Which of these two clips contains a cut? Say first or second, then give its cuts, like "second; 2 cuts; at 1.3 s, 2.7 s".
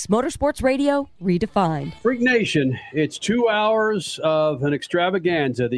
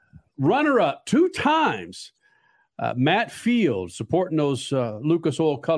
first; 1 cut; at 1.8 s